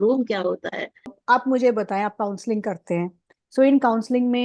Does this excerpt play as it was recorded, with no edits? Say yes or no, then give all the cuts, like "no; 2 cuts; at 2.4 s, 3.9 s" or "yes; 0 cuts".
no; 1 cut; at 1.2 s